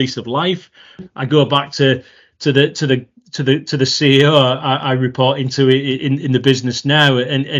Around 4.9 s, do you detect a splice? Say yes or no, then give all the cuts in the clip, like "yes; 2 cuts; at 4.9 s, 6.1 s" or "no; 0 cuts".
no; 0 cuts